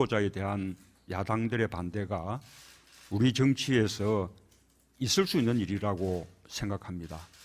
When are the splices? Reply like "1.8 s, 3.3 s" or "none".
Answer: 1.8 s